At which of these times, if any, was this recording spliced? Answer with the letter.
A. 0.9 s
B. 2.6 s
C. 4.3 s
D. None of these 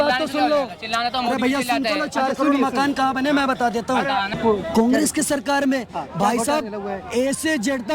C